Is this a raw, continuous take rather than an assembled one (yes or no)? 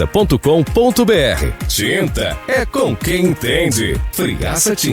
yes